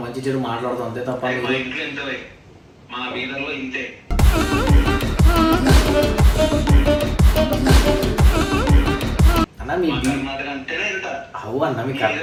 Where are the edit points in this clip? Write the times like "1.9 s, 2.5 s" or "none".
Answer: none